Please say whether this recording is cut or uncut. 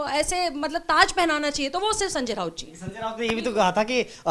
uncut